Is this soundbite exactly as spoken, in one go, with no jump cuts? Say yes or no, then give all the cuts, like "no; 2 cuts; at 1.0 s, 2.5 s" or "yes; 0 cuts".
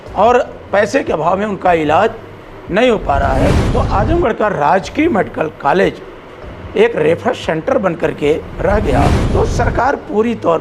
no; 2 cuts; at 3.7 s, 9.2 s